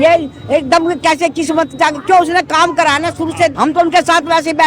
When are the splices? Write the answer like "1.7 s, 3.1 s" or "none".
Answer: 3.5 s

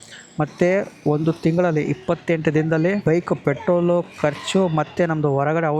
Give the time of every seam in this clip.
3.0 s

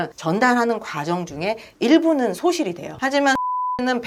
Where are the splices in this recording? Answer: none

